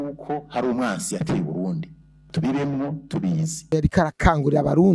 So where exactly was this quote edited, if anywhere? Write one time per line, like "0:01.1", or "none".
0:03.7